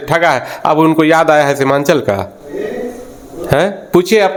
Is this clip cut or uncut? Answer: uncut